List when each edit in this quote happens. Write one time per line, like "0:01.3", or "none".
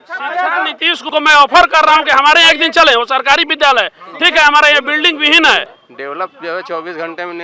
0:01.0
0:05.7